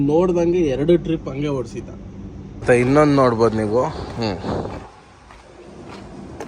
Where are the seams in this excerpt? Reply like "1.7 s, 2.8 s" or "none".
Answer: 2.6 s